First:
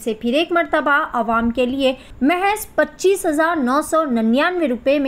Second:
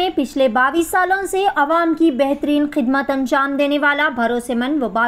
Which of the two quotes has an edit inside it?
first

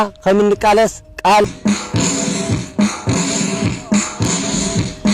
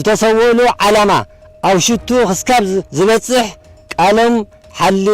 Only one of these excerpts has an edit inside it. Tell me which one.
first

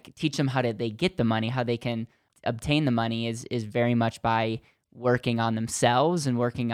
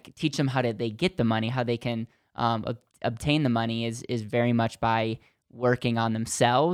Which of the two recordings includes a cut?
first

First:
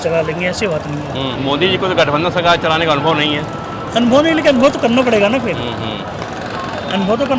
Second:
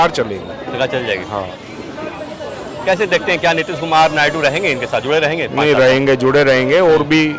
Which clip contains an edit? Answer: first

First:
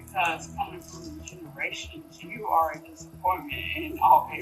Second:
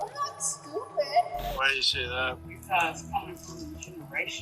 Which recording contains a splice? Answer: second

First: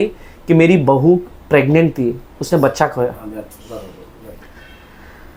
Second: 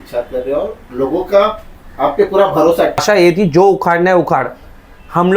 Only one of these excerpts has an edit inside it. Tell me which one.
second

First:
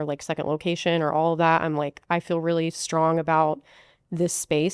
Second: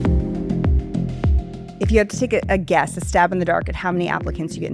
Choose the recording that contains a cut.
second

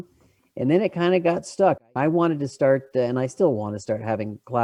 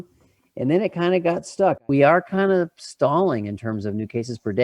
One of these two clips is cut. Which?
second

